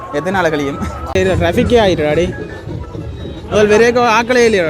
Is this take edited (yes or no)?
yes